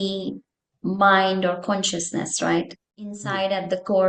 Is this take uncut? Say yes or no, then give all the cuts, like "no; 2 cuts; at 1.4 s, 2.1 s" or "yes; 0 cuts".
no; 1 cut; at 3.1 s